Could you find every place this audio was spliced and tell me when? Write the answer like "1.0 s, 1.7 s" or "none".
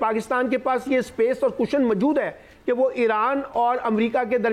none

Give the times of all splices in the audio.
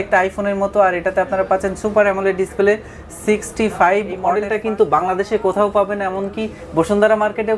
4.3 s

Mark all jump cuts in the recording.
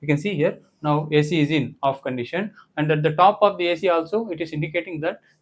none

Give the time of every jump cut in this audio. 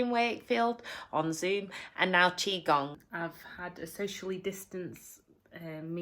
3.1 s

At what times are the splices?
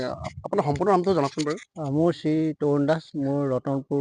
none

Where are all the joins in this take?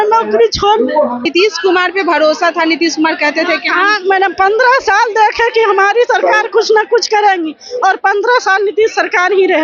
1.2 s

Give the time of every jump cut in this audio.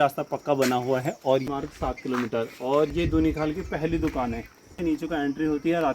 1.4 s, 4.8 s

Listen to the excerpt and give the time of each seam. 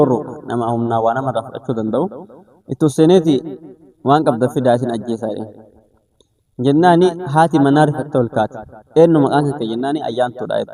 none

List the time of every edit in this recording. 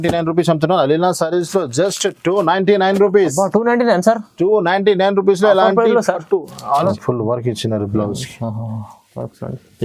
6.9 s

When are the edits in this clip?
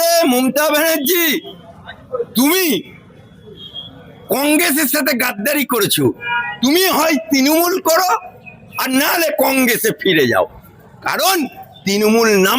none

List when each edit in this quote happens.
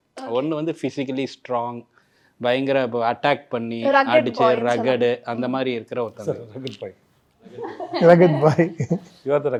none

